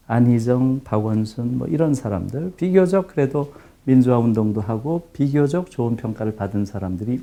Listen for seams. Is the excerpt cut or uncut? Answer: uncut